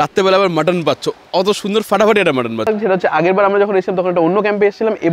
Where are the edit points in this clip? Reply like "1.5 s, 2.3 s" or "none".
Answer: 2.7 s